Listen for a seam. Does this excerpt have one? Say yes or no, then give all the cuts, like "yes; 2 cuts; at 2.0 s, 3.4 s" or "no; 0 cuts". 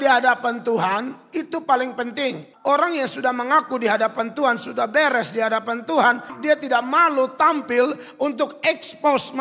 yes; 2 cuts; at 2.5 s, 6.4 s